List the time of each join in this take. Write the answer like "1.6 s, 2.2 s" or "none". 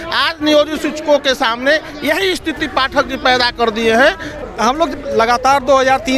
4.4 s